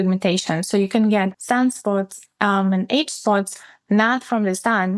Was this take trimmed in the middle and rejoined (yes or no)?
yes